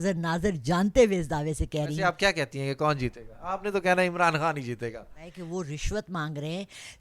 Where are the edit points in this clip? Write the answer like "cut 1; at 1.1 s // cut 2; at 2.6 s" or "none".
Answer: cut 1; at 2.0 s // cut 2; at 5.3 s